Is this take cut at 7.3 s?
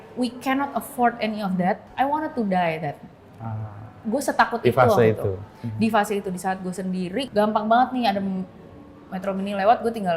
yes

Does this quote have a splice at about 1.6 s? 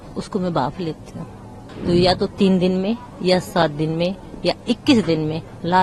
yes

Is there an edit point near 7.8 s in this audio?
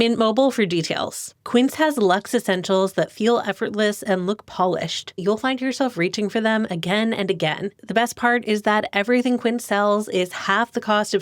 yes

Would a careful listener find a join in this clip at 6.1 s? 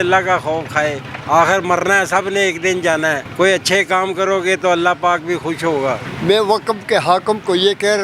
yes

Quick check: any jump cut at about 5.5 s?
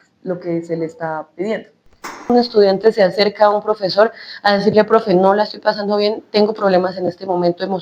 no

